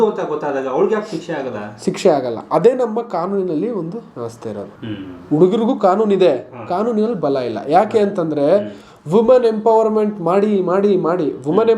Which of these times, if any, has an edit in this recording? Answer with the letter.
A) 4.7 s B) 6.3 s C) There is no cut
A